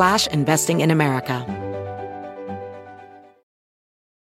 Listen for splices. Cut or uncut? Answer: cut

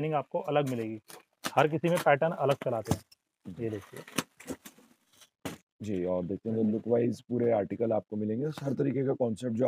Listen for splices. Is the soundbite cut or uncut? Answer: uncut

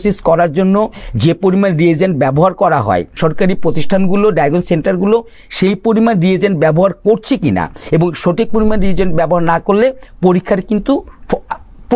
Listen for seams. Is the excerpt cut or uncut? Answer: cut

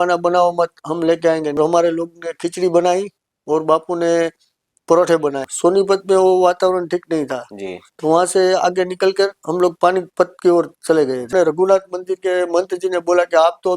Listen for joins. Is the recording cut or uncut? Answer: cut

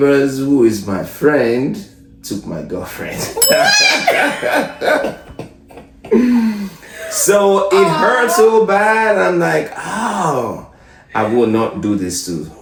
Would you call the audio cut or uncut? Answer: uncut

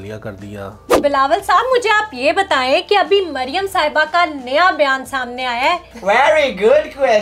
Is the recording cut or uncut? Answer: cut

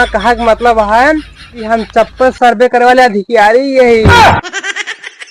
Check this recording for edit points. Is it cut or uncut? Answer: uncut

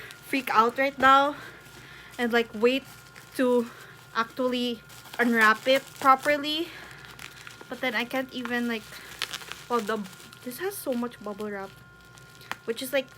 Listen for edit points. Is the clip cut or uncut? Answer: cut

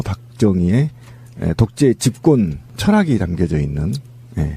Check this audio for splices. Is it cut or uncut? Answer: cut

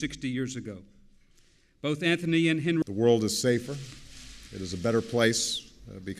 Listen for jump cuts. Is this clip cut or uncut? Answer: uncut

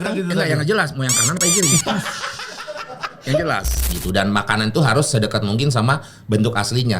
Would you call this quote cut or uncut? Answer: cut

